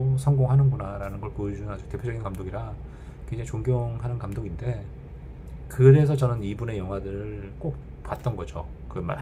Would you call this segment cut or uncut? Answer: uncut